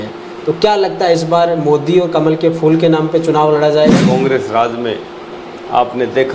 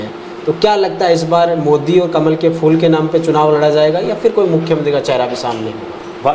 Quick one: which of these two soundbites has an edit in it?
first; 1 cut; at 4.0 s

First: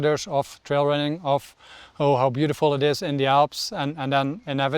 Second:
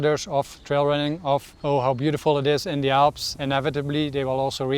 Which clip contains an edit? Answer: second; 2 cuts; at 1.5 s, 3.3 s

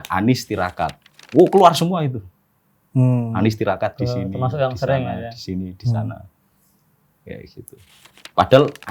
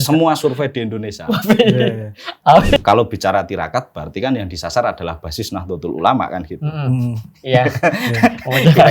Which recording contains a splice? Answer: second; 1 cut; at 2.8 s

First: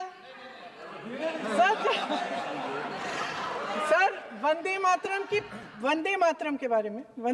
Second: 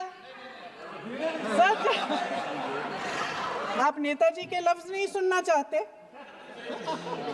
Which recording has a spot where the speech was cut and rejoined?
second; 1 cut; at 3.8 s

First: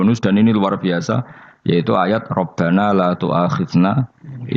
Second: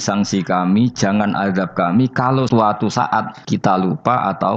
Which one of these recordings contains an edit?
second; 2 cuts; at 2.5 s, 3.4 s

